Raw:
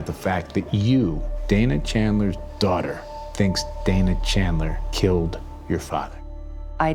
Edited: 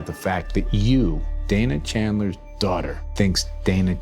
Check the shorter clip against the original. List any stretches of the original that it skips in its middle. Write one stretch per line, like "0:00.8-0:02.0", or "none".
0:03.0-0:03.2